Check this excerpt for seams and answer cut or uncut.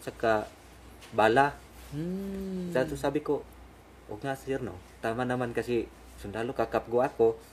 uncut